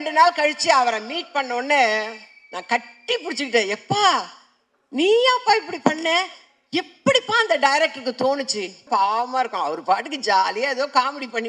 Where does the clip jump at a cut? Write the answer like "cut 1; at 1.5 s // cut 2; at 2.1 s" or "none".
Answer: cut 1; at 8.8 s